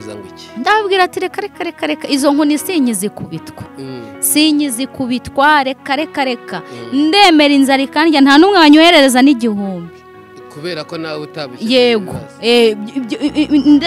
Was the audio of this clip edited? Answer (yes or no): no